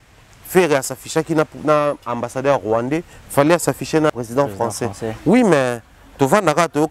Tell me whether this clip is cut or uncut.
cut